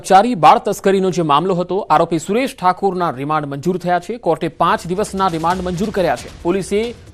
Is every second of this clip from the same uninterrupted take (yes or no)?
yes